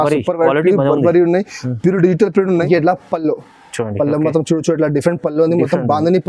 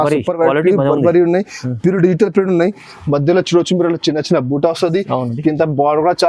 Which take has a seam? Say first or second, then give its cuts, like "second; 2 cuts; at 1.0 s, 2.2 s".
first; 1 cut; at 2.7 s